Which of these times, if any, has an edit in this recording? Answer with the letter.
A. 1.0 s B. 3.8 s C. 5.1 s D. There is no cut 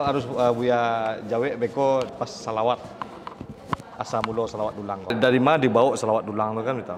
C